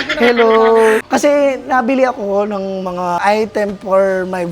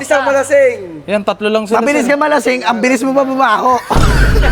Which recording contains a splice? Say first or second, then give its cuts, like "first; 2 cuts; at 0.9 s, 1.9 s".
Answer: first; 2 cuts; at 1.1 s, 3.2 s